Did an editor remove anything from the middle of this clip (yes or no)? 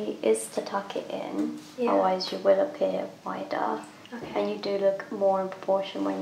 no